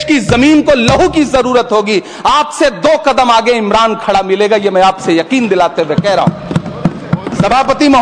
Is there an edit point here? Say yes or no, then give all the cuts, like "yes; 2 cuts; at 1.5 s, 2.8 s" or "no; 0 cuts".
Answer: no; 0 cuts